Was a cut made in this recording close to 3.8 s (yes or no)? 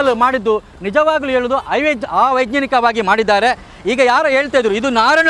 no